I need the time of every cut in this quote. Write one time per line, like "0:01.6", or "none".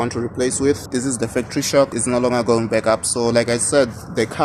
0:00.9
0:02.0